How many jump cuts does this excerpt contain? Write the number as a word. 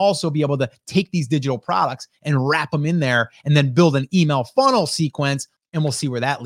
one